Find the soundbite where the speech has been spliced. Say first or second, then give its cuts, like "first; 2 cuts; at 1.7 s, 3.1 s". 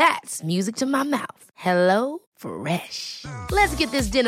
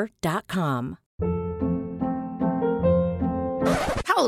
second; 1 cut; at 1.0 s